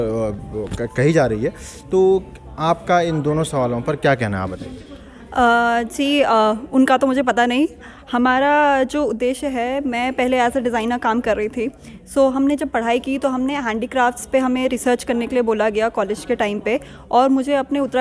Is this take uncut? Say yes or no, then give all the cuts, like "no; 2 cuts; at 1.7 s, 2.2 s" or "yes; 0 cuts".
yes; 0 cuts